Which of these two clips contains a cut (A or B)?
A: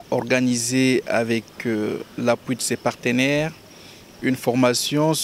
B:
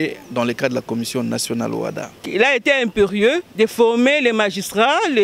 B